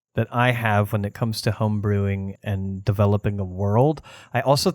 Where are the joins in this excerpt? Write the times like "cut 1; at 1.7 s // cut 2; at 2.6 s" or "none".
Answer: cut 1; at 2.3 s